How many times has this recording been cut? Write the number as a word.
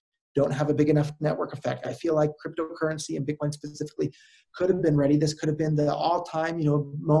one